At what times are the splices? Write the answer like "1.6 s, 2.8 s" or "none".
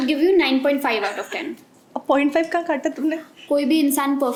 none

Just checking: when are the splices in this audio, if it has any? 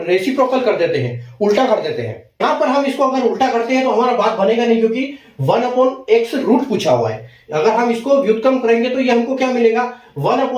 2.4 s

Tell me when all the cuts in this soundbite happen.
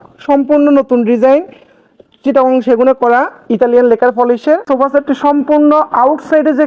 4.6 s

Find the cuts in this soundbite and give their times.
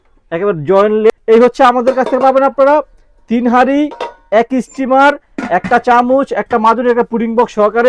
1.1 s

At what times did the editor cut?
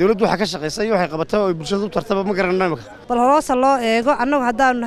2.9 s

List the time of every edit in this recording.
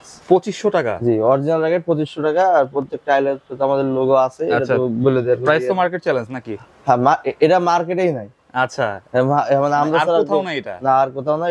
none

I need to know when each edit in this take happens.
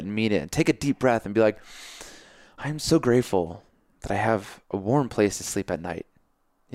none

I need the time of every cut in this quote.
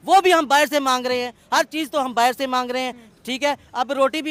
none

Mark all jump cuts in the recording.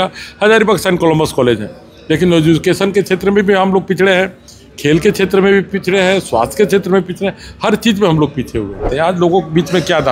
8.9 s

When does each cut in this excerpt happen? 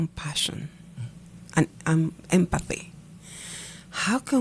none

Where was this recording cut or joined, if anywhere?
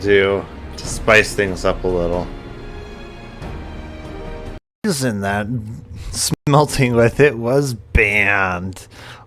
4.7 s, 6.4 s

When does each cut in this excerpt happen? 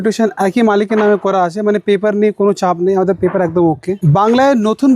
3.9 s

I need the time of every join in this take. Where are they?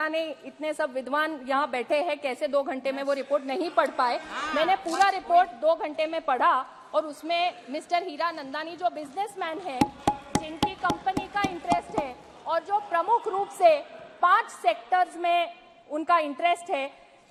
none

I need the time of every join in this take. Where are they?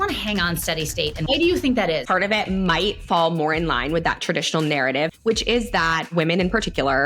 1.3 s, 2.0 s, 5.1 s, 6.1 s

